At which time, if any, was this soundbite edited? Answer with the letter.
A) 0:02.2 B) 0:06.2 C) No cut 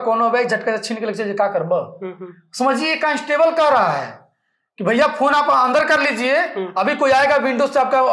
C